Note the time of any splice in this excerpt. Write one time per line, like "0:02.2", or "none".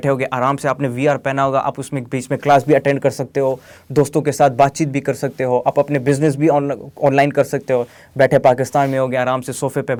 none